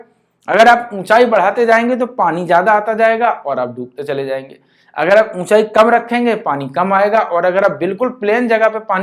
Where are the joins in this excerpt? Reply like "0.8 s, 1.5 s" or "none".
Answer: none